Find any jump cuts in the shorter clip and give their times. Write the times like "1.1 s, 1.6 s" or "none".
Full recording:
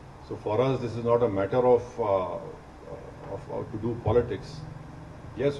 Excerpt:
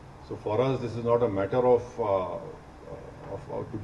none